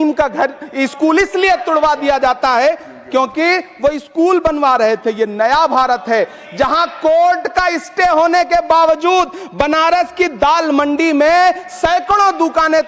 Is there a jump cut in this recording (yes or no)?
no